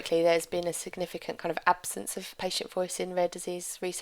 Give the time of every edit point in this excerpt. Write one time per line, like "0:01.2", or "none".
0:02.3